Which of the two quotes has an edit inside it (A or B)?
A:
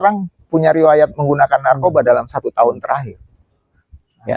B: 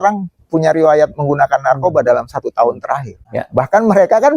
B